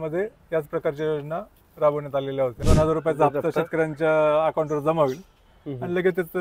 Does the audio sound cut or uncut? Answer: cut